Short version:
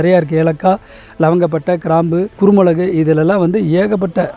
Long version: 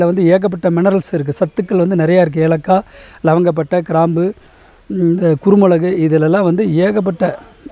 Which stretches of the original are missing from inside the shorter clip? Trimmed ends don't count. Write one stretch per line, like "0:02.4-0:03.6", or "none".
0:04.4-0:05.4